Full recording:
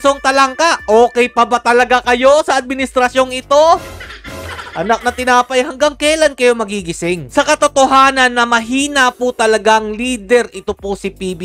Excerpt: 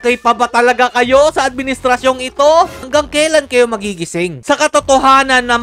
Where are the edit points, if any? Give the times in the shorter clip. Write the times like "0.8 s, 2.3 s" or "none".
2.8 s